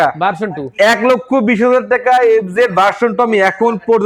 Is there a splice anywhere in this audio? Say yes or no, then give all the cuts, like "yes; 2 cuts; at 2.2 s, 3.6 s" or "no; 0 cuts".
no; 0 cuts